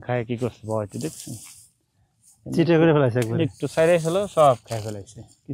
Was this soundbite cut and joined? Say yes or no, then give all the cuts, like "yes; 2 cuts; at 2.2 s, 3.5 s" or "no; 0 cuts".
no; 0 cuts